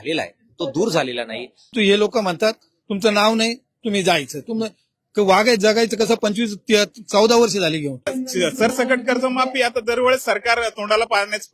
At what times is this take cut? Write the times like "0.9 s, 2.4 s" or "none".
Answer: 1.7 s, 8.1 s